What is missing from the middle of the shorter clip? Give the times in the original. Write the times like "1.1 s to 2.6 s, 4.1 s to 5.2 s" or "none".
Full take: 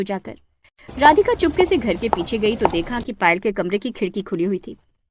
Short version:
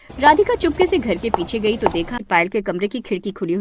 3.0 s to 3.1 s